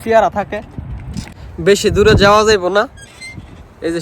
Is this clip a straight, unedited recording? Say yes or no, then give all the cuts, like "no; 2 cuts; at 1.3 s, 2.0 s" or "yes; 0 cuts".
no; 1 cut; at 1.5 s